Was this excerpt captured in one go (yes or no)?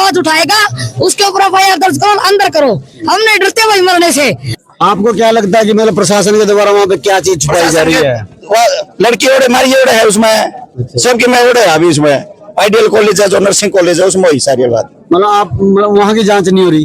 no